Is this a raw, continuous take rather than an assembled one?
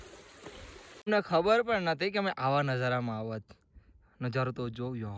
no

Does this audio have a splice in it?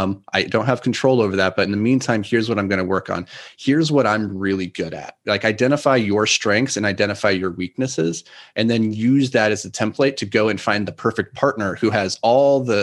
no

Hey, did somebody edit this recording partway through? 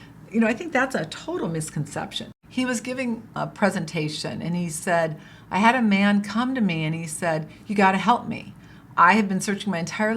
yes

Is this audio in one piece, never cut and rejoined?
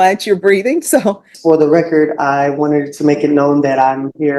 no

